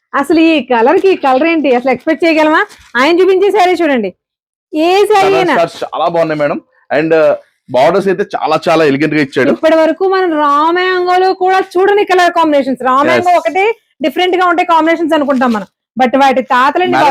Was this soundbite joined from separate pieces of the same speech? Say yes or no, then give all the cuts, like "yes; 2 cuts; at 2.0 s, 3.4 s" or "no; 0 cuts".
no; 0 cuts